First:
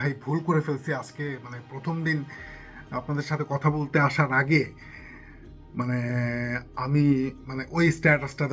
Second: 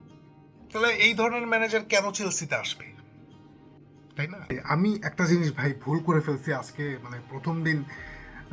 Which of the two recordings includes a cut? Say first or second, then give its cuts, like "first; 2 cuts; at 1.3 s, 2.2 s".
second; 1 cut; at 4.6 s